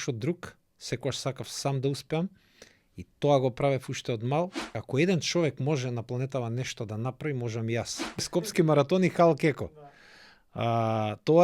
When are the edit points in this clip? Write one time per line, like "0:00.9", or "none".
0:04.7
0:08.4

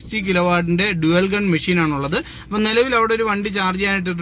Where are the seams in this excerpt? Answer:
none

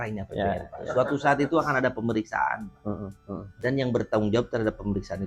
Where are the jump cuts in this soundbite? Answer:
none

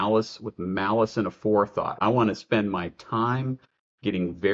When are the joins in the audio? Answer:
0:02.0

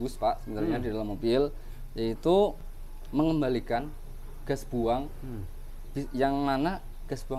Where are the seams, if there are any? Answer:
none

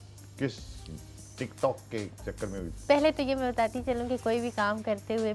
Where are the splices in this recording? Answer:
none

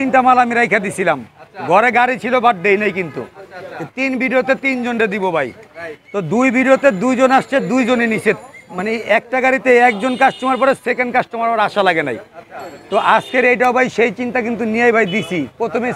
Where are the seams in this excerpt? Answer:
none

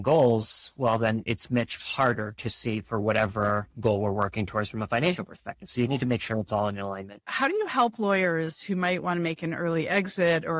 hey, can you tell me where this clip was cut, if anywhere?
0:07.2

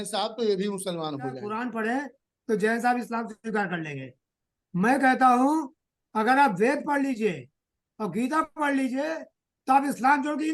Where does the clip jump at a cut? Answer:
0:01.5

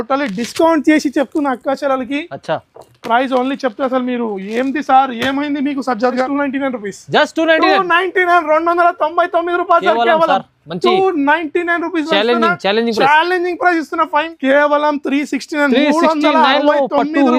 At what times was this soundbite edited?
0:06.2
0:14.3

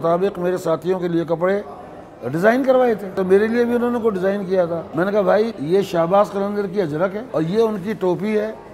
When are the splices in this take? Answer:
0:03.1
0:04.9
0:05.6
0:07.2

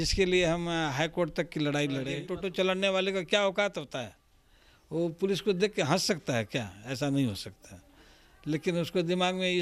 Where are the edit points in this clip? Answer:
0:02.2

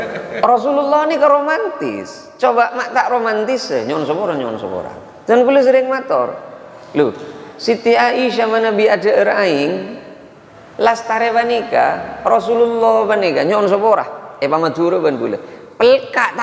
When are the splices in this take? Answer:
none

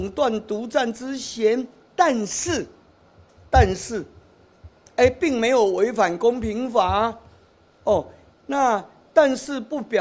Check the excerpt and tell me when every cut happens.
none

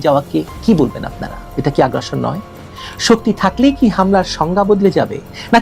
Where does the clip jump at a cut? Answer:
none

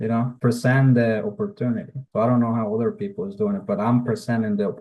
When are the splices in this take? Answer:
none

